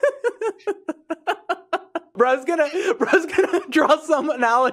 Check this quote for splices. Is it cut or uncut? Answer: cut